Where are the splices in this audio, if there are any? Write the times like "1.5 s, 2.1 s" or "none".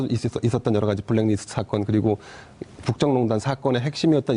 3.3 s